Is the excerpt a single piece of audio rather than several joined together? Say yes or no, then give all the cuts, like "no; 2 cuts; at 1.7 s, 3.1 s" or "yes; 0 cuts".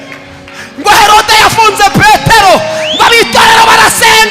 yes; 0 cuts